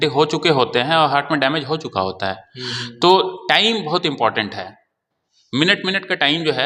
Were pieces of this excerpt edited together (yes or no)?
no